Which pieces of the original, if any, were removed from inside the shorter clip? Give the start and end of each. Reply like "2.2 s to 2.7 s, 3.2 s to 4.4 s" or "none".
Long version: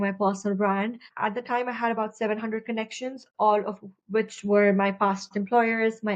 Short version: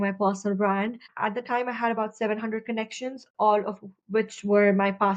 none